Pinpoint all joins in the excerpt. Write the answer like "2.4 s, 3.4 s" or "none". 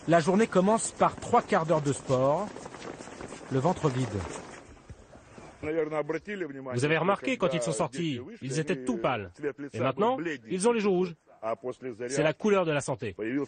5.6 s

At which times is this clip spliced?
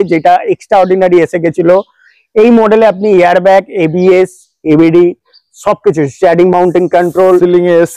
none

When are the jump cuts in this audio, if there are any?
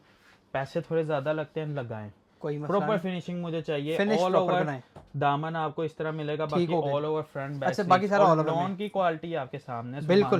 none

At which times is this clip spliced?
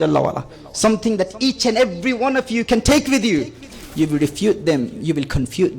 3.7 s

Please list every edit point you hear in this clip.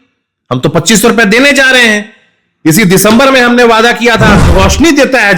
4.5 s

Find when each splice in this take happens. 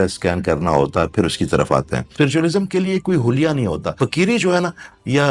2.0 s, 4.0 s

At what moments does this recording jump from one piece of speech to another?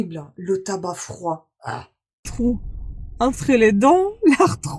2.3 s

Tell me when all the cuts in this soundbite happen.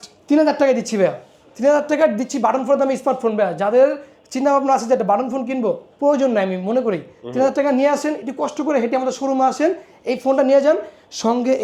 none

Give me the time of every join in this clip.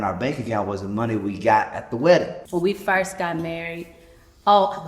2.4 s

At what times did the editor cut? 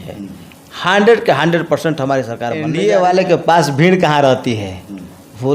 2.6 s

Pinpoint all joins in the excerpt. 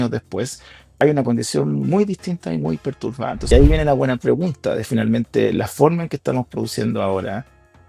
1.0 s, 3.5 s

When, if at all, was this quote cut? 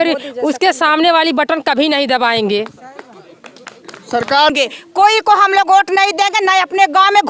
4.5 s

